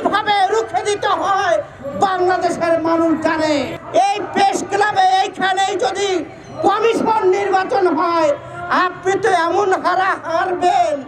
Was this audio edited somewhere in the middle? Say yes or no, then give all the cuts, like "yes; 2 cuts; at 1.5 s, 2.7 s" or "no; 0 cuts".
yes; 1 cut; at 3.8 s